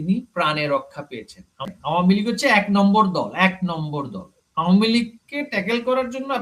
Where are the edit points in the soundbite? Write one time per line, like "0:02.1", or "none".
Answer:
0:01.7